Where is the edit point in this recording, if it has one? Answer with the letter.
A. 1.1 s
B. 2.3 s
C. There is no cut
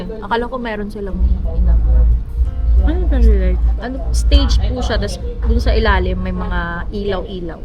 C